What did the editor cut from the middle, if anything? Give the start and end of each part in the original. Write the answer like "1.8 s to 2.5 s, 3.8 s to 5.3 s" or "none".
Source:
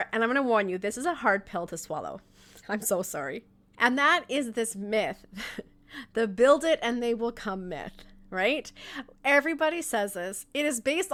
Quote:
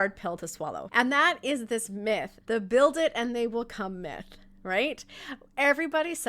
2.1 s to 3.7 s, 5.2 s to 6.0 s